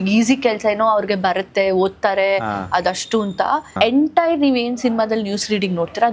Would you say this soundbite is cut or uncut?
cut